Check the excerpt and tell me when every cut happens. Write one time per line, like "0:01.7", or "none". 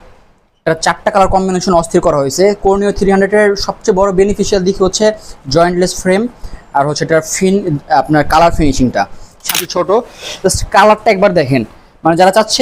0:09.6